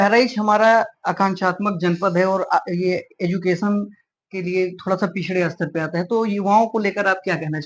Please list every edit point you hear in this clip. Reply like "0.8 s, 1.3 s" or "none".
none